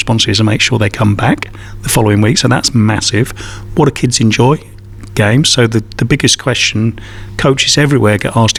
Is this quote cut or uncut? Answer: uncut